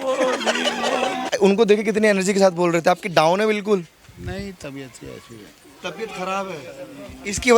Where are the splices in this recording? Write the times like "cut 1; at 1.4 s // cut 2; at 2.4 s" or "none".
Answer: cut 1; at 1.2 s